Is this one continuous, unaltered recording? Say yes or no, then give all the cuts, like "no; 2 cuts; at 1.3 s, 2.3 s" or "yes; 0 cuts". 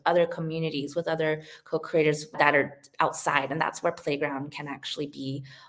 yes; 0 cuts